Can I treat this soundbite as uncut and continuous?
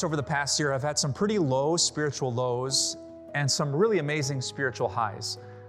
yes; 0 cuts

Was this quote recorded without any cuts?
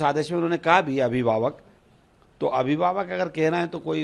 yes; 0 cuts

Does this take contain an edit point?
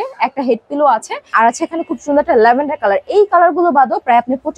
yes; 1 cut; at 1.3 s

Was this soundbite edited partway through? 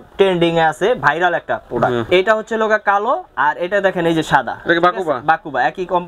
yes; 1 cut; at 2.1 s

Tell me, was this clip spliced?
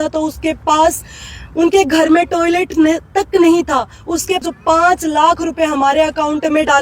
yes; 1 cut; at 4.4 s

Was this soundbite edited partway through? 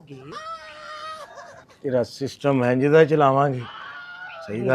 yes; 1 cut; at 1.7 s

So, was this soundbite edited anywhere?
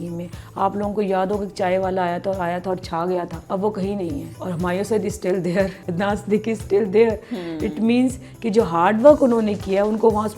yes; 3 cuts; at 3.4 s, 4.3 s, 5.8 s

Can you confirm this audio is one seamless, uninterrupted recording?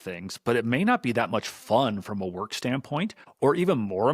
no; 1 cut; at 3.2 s

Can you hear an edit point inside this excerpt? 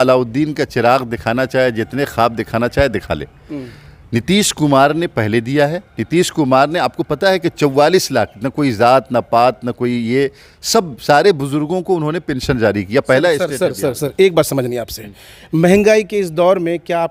no; 0 cuts

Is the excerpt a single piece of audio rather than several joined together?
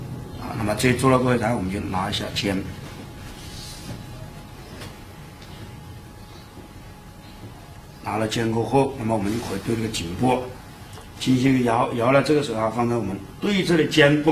no; 1 cut; at 1.5 s

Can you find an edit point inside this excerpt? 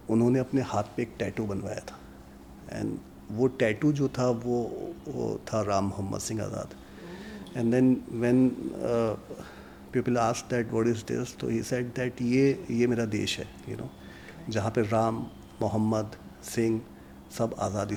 no; 0 cuts

